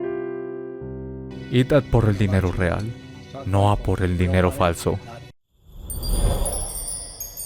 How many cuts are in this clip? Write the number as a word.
two